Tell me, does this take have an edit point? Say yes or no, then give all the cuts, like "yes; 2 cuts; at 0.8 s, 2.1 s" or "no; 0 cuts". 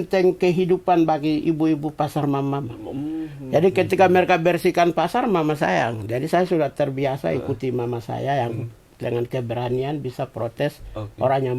no; 0 cuts